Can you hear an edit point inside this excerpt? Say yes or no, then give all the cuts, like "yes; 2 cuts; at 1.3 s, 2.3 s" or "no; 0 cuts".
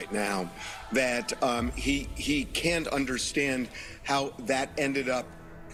no; 0 cuts